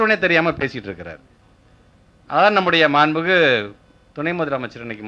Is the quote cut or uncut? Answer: uncut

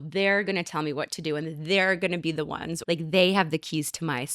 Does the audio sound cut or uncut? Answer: cut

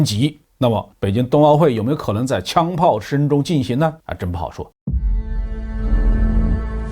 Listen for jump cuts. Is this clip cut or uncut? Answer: cut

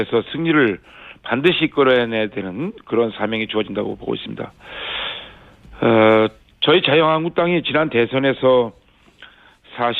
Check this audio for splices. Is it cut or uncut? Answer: cut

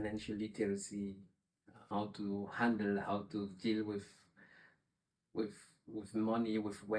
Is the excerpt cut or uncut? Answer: uncut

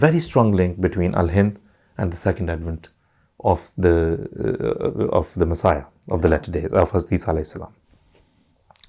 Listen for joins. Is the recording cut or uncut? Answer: uncut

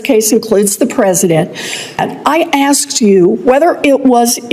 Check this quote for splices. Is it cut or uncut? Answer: cut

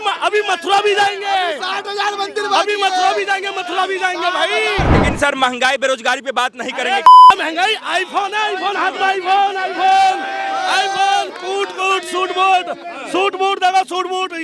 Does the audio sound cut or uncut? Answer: cut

